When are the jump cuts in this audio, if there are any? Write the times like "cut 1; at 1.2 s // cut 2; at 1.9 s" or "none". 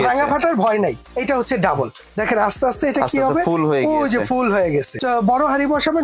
cut 1; at 1.1 s // cut 2; at 4.9 s